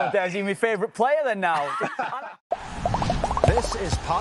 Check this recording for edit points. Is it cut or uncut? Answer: cut